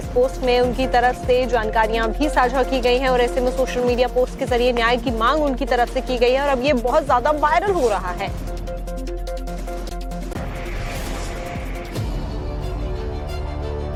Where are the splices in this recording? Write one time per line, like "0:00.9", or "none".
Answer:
none